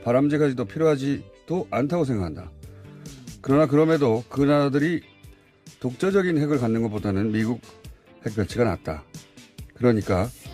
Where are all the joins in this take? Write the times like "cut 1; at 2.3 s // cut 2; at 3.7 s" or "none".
cut 1; at 1.3 s